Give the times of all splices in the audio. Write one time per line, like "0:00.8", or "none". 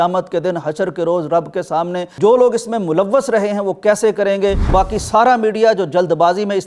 0:02.1
0:04.7